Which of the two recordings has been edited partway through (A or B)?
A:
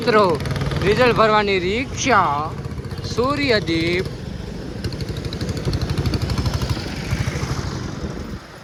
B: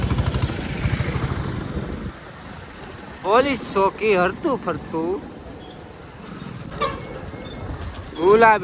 B